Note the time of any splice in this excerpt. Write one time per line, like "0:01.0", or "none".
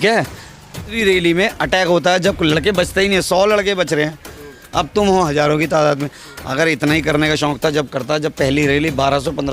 0:01.0